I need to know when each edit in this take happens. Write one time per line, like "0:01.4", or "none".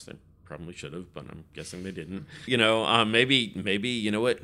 0:02.4

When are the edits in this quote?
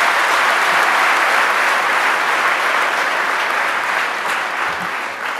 none

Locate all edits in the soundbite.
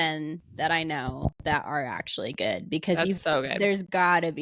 none

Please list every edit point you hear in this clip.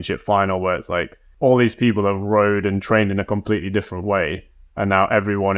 0:01.2

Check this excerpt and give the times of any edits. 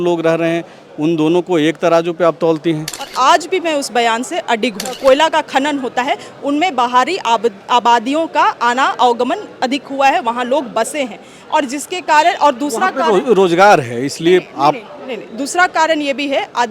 0:03.0
0:04.9

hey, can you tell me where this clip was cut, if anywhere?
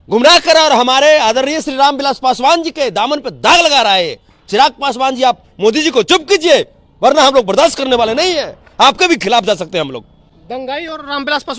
none

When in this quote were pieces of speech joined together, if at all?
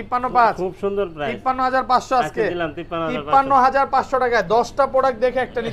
none

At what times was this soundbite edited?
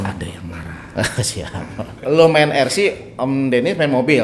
0:01.8

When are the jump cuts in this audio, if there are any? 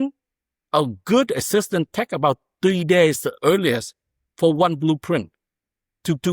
none

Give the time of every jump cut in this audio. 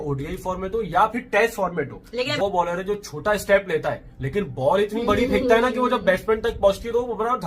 0:02.4

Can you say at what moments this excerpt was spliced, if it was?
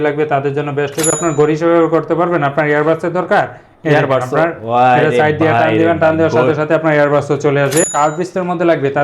0:01.2
0:07.9

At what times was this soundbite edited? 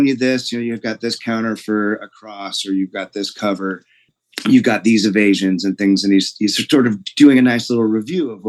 none

